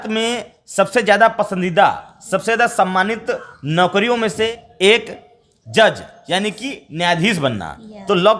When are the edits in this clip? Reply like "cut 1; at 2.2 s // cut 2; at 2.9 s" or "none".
cut 1; at 4.5 s

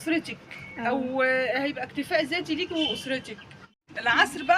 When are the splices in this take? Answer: cut 1; at 3.7 s

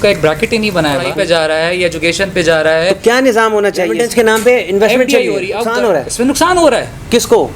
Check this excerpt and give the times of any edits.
cut 1; at 1.0 s // cut 2; at 4.0 s // cut 3; at 5.7 s

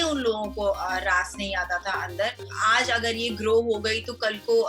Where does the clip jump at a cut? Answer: cut 1; at 2.5 s

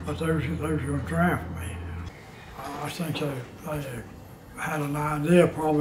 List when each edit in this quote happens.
cut 1; at 2.0 s

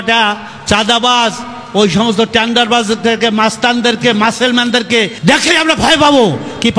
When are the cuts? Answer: cut 1; at 5.1 s

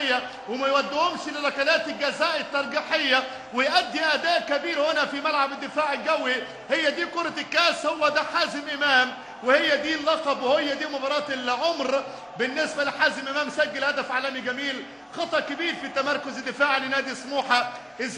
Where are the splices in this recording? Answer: cut 1; at 8.1 s

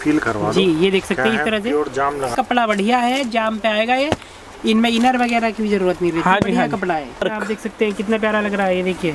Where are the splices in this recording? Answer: cut 1; at 2.3 s // cut 2; at 7.2 s

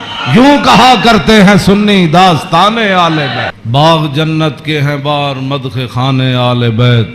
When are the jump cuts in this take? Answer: cut 1; at 3.6 s

